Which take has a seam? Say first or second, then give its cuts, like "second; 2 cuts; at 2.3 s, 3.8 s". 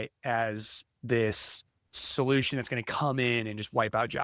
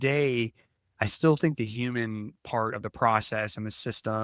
first; 1 cut; at 2.0 s